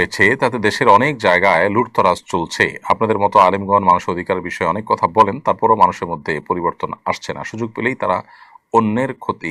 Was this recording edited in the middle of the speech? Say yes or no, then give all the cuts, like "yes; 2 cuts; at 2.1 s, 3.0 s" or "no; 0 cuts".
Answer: no; 0 cuts